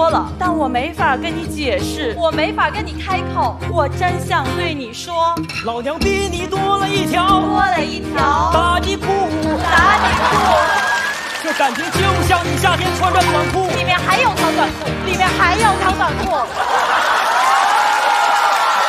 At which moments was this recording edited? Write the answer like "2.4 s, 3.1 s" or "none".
none